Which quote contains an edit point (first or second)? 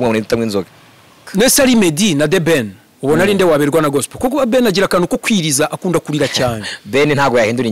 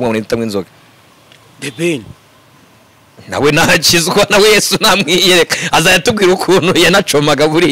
first